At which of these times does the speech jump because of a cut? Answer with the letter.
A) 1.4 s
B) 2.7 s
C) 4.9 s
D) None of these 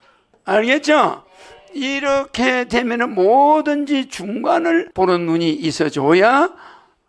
C